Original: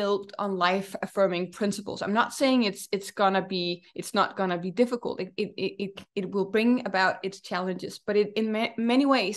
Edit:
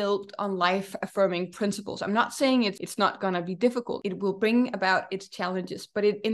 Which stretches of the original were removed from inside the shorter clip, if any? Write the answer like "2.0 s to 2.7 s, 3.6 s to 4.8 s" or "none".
2.8 s to 4.0 s, 5.1 s to 6.1 s